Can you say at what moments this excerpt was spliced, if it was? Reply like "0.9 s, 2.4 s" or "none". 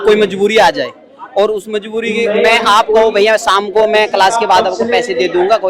none